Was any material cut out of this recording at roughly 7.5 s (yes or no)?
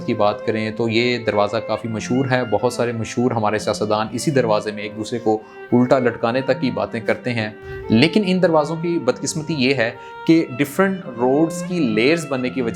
yes